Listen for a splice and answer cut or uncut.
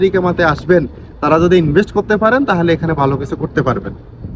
uncut